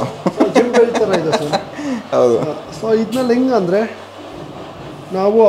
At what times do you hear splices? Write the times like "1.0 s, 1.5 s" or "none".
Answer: none